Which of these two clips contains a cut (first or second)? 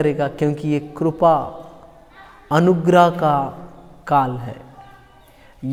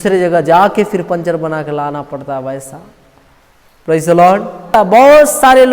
second